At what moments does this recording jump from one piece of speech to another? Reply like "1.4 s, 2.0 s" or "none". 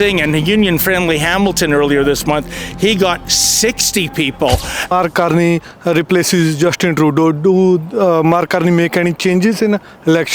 4.9 s